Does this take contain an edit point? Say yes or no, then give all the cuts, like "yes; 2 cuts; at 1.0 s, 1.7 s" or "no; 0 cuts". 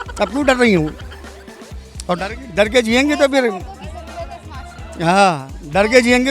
no; 0 cuts